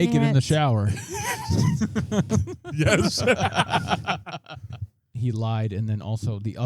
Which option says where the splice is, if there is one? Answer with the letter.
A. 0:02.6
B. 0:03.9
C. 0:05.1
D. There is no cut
C